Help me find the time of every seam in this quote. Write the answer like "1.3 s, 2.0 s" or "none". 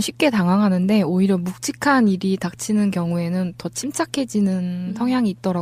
3.9 s